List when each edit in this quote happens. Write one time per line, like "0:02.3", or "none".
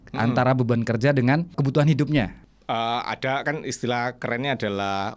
0:01.5
0:02.4